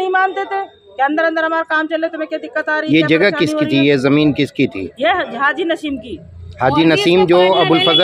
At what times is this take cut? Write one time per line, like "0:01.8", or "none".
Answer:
none